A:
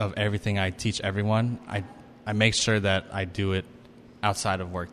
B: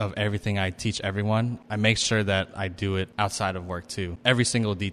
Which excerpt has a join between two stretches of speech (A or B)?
B